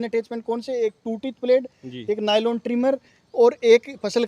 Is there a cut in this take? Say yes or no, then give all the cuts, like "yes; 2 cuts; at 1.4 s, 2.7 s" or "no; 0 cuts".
no; 0 cuts